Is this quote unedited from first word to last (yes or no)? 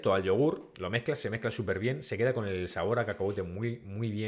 yes